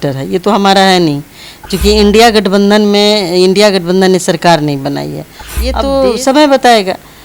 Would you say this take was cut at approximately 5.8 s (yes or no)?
yes